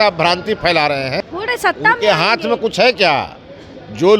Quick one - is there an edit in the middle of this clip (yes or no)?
yes